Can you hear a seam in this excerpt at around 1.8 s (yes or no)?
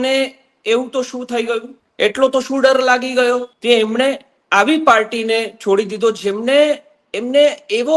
yes